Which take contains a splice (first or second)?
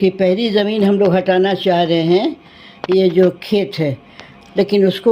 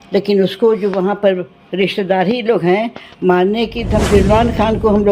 second